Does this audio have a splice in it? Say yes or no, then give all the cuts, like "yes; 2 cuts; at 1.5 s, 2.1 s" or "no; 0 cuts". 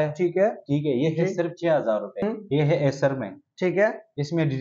yes; 1 cut; at 2.2 s